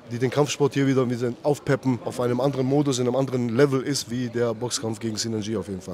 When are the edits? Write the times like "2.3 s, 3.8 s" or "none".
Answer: 2.1 s